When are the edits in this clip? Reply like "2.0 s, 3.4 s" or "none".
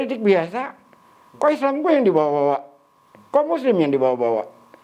none